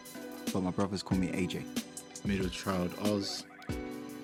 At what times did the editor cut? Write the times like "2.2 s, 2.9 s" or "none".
none